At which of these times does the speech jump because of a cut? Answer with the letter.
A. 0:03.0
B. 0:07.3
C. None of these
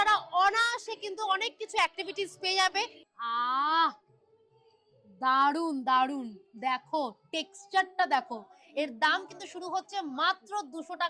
A